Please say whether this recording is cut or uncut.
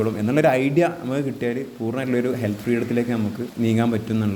cut